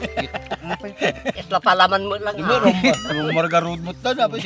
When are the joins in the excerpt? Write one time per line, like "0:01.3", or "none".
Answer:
0:01.4